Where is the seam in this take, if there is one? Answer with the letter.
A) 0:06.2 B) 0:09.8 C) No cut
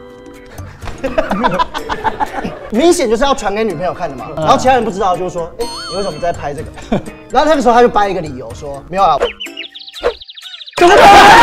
C